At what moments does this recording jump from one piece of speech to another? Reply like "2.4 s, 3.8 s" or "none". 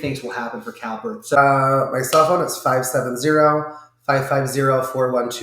1.4 s